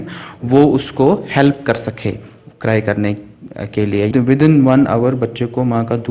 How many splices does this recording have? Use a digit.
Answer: 1